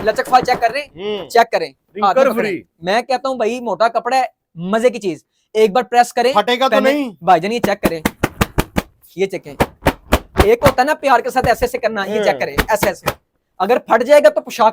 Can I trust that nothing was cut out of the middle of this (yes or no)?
yes